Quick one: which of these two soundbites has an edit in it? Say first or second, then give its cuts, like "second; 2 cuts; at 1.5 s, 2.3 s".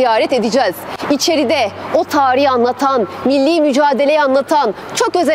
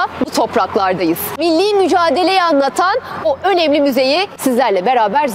second; 2 cuts; at 1.4 s, 4.3 s